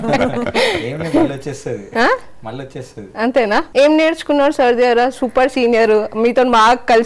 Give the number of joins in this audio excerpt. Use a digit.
1